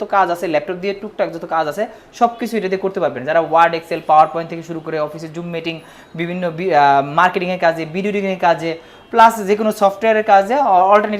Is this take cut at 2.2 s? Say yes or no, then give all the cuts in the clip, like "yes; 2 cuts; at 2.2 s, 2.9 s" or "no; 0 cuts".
no; 0 cuts